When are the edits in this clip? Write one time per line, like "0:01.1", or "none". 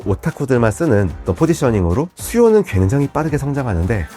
0:02.1